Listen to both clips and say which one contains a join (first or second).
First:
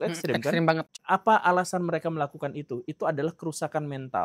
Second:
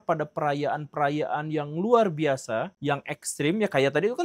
first